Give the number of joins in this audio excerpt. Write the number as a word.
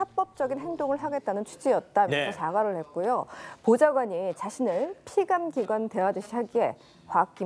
one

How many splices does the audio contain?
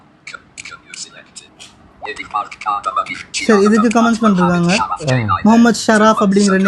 one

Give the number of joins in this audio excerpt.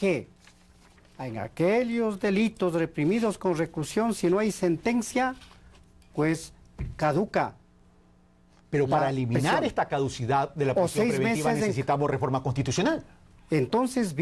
one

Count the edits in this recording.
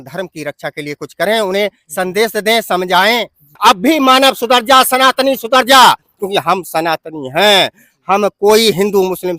one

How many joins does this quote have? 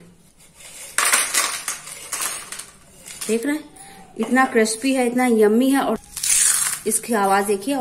one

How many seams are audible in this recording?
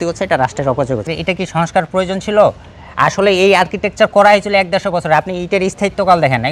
one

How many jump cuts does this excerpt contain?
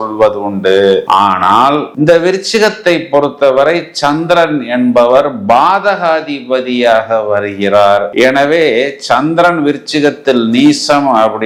zero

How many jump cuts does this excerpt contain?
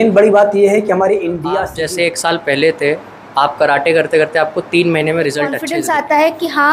two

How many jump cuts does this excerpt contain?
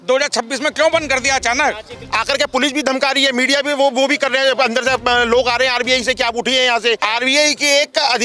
two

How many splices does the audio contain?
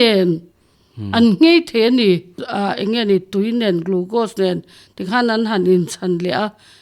one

